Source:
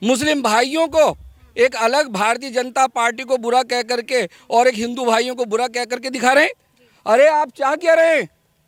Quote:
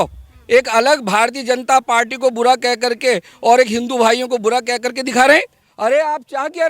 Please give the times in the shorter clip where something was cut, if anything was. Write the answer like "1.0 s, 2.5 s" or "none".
5.6 s